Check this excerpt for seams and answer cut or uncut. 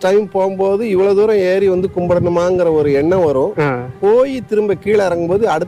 uncut